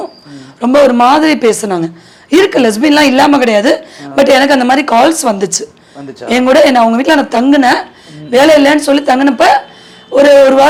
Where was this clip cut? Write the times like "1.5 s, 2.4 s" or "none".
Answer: none